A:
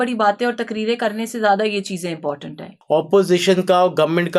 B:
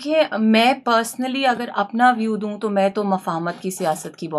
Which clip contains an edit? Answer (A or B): A